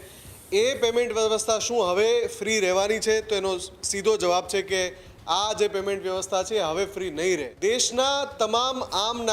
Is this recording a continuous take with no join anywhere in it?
no; 1 cut; at 7.5 s

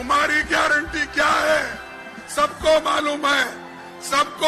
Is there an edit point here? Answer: no; 0 cuts

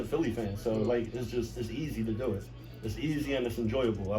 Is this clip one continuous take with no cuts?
yes; 0 cuts

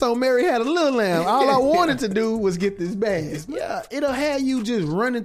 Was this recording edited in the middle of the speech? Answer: yes; 1 cut; at 3.5 s

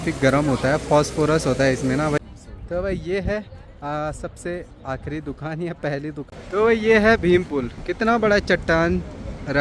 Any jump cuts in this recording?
yes; 2 cuts; at 2.2 s, 6.3 s

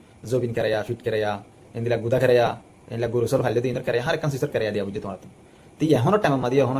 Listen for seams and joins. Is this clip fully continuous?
yes; 0 cuts

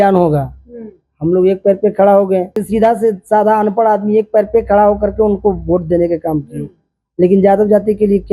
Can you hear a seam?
yes; 1 cut; at 2.6 s

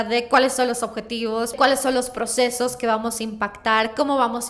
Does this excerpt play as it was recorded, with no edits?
no; 1 cut; at 1.5 s

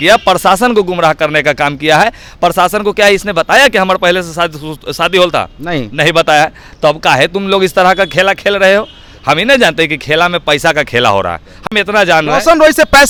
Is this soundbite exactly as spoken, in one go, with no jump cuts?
yes; 0 cuts

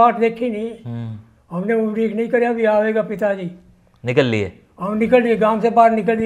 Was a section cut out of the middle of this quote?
no; 0 cuts

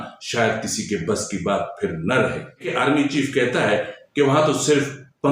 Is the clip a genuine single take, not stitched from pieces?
no; 1 cut; at 2.7 s

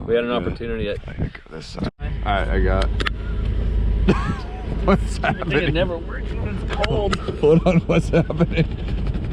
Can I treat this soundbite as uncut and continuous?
no; 1 cut; at 1.9 s

